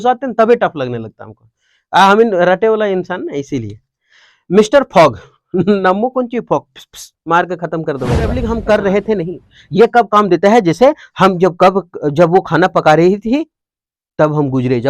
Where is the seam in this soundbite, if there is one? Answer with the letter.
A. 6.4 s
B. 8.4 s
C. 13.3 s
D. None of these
B